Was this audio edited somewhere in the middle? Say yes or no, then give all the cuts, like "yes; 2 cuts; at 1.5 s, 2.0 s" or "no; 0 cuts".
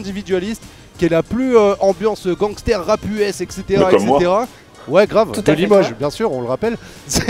no; 0 cuts